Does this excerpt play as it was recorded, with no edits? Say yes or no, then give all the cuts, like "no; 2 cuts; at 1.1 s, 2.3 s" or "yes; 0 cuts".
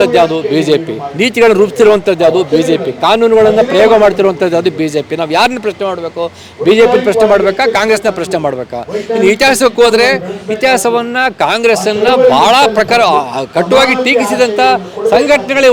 yes; 0 cuts